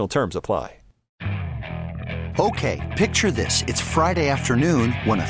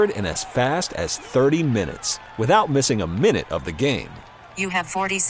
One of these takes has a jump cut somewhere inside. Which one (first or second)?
first